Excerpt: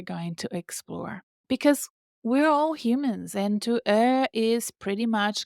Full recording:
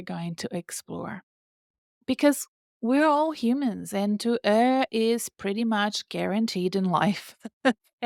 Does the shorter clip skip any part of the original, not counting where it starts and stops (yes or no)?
yes